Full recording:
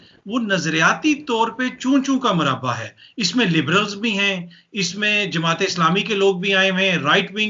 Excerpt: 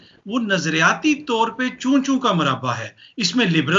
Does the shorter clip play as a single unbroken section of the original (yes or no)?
yes